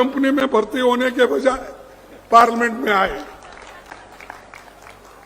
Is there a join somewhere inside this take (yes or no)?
no